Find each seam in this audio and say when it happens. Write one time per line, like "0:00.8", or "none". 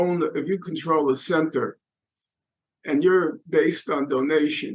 none